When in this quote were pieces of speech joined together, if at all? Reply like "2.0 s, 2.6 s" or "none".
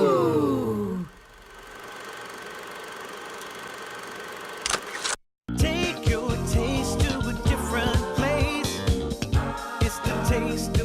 5.2 s